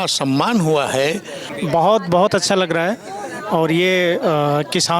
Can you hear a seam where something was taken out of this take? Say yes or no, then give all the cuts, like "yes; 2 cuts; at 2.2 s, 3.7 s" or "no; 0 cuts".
yes; 1 cut; at 1.5 s